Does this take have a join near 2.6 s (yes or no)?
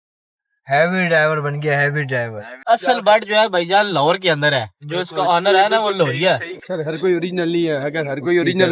yes